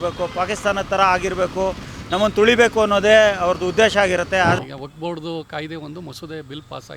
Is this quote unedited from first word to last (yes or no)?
no